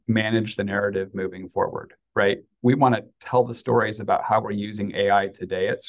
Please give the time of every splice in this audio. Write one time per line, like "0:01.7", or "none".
none